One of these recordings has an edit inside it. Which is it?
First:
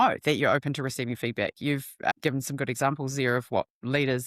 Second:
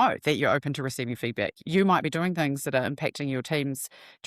second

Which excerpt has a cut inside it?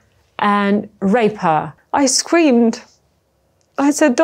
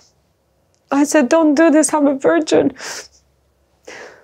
first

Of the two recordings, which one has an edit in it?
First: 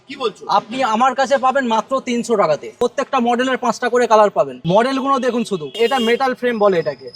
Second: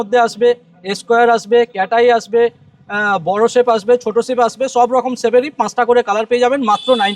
first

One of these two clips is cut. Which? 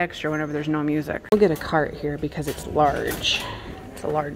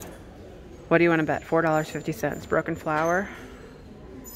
first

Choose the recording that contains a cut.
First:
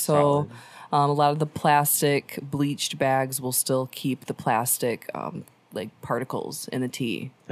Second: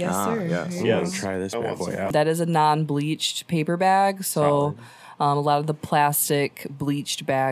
second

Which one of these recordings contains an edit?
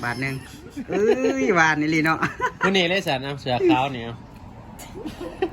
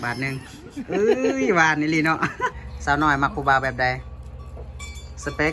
second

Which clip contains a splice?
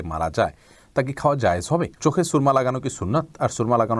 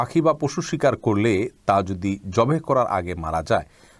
first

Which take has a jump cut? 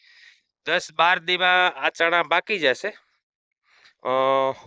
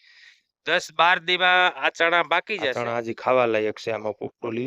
second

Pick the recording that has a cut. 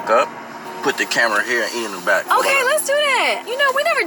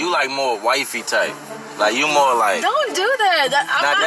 first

